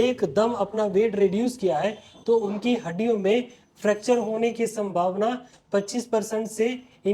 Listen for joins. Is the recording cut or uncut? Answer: uncut